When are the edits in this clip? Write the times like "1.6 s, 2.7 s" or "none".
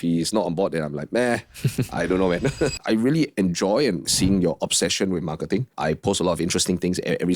2.8 s, 4.1 s, 5.7 s